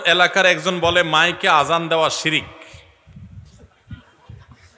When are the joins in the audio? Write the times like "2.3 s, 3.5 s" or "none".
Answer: none